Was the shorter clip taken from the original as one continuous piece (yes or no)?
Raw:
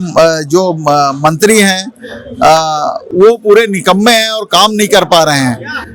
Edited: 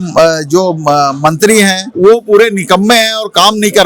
no